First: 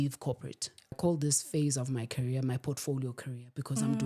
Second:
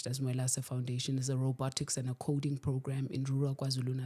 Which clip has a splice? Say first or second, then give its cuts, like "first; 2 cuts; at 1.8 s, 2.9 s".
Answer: first; 1 cut; at 1.0 s